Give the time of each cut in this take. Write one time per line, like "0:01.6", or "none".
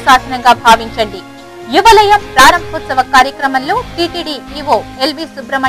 none